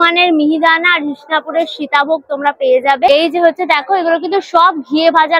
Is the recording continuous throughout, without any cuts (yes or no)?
yes